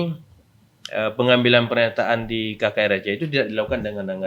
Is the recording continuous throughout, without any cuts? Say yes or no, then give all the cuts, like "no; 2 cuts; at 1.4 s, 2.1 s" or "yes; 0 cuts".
yes; 0 cuts